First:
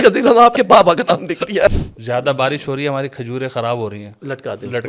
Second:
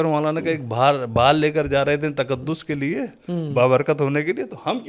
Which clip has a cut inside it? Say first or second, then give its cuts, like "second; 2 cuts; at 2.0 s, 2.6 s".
first; 1 cut; at 1.7 s